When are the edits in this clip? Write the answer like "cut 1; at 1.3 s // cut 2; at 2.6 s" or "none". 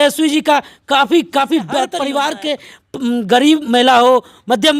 cut 1; at 1.9 s

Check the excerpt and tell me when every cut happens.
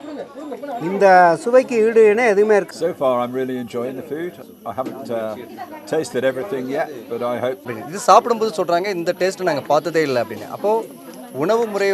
cut 1; at 2.7 s // cut 2; at 7.7 s

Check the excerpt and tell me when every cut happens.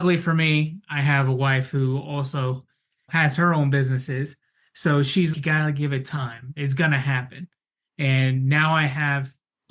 none

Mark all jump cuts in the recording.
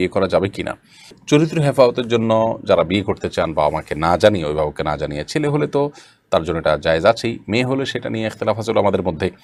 none

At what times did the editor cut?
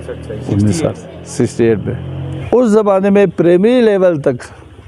cut 1; at 2.1 s

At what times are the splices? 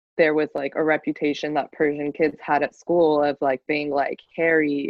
none

